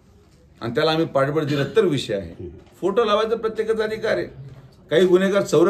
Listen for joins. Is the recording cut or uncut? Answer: uncut